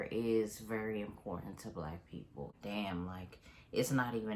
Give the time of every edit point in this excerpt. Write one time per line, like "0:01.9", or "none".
0:02.5